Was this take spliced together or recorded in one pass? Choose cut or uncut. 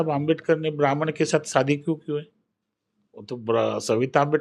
uncut